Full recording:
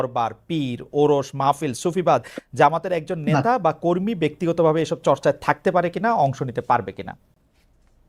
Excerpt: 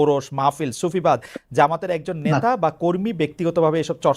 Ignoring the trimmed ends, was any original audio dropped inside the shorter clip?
no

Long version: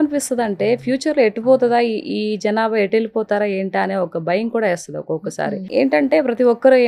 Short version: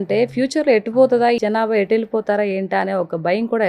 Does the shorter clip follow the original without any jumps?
no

